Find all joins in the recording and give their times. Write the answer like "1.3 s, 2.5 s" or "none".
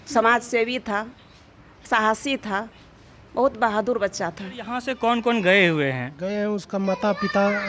4.9 s